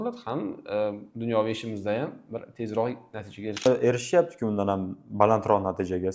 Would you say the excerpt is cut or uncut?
cut